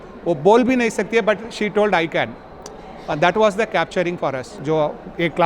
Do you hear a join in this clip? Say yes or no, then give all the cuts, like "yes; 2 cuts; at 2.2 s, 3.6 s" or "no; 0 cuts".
yes; 1 cut; at 4.5 s